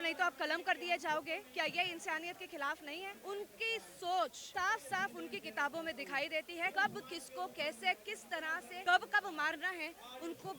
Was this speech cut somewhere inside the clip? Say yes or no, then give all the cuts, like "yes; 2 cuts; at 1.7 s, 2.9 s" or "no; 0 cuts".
yes; 4 cuts; at 3.2 s, 4.4 s, 6.7 s, 8.7 s